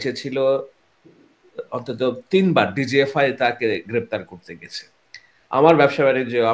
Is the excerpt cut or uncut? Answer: uncut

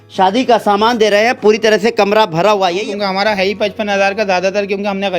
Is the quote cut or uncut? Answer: cut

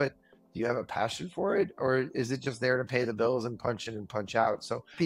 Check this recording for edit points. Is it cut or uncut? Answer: uncut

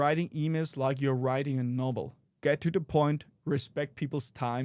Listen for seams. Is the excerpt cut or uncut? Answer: uncut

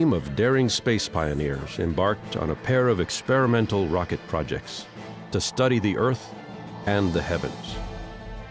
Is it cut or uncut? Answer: uncut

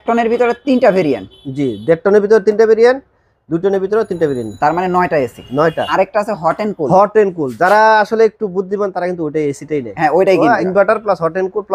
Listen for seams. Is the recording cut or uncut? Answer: cut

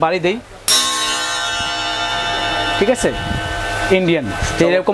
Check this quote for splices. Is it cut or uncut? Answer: uncut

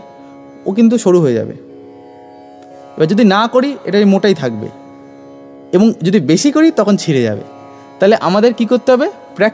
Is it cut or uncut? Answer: uncut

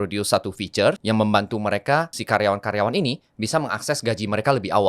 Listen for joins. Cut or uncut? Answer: cut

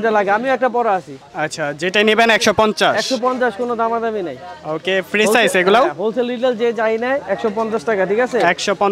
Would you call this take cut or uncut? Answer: uncut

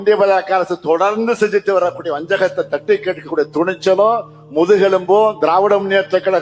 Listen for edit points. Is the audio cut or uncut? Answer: uncut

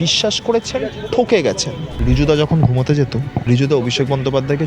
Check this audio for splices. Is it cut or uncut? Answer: cut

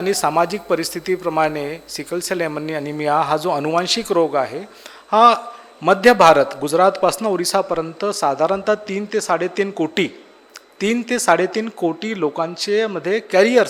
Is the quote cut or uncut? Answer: uncut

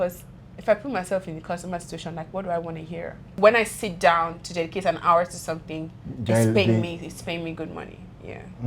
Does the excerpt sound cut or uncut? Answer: cut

